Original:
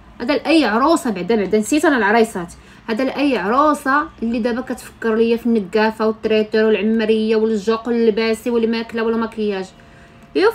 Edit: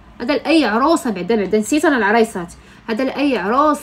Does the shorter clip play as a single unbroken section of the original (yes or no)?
yes